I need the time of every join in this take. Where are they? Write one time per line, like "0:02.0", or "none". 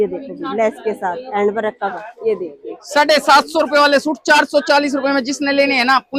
none